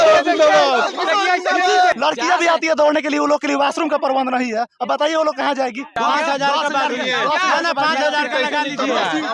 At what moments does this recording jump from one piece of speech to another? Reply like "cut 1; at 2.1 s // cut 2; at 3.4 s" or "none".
cut 1; at 1.9 s // cut 2; at 5.9 s